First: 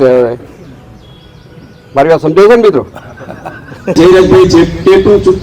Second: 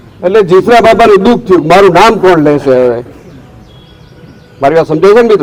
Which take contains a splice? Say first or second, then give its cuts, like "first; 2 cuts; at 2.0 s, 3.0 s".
first; 1 cut; at 3.9 s